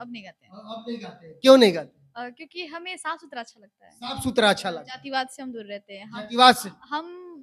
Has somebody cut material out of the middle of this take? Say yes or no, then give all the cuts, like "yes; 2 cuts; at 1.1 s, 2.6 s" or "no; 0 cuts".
no; 0 cuts